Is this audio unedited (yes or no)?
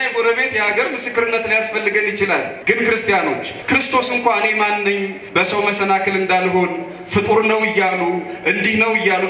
no